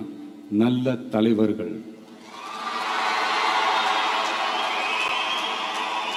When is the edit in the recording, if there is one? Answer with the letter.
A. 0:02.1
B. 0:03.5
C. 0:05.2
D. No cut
D